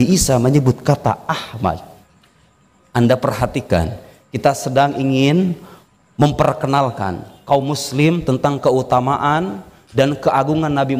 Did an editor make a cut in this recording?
no; 0 cuts

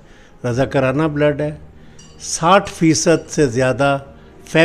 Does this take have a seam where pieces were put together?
no; 0 cuts

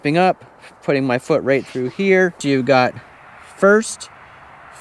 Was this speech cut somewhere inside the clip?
yes; 1 cut; at 2.4 s

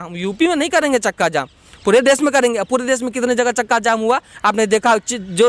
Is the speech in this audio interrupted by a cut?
no; 0 cuts

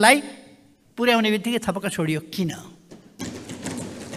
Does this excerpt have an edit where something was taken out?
no; 0 cuts

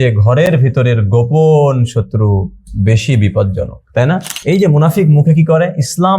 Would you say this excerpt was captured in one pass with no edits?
no; 1 cut; at 4.3 s

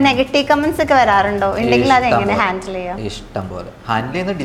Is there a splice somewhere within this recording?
no; 0 cuts

